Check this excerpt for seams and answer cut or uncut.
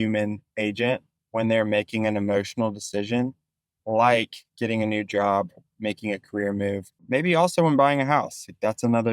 cut